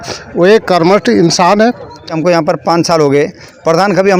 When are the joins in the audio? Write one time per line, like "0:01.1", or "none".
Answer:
0:02.1